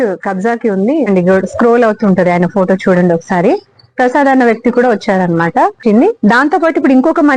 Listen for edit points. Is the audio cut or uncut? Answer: cut